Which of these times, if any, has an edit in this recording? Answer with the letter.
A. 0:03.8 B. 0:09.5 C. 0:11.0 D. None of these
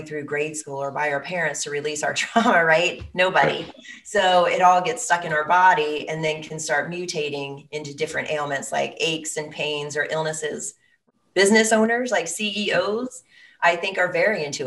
C